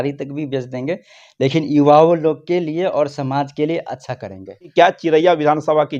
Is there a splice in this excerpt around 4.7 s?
yes; 1 cut; at 4.7 s

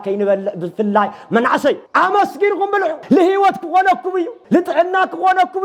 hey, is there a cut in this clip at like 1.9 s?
yes; 3 cuts; at 1.9 s, 3.0 s, 4.4 s

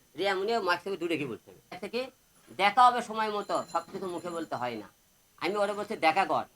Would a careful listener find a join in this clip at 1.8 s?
yes; 1 cut; at 1.8 s

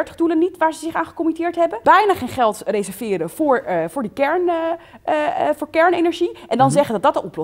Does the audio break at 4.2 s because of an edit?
no; 1 cut; at 1.8 s

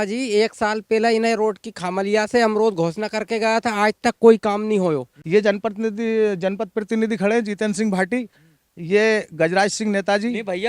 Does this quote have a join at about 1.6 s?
no; 1 cut; at 5.1 s

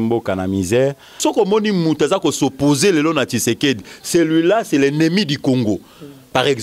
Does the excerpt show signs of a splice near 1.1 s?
yes; 1 cut; at 1.1 s

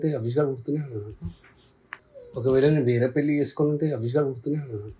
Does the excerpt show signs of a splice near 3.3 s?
no; 1 cut; at 1.8 s

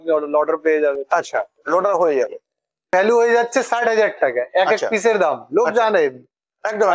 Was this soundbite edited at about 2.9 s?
yes; 1 cut; at 2.9 s

